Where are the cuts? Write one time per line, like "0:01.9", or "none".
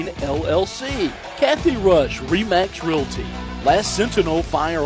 0:01.2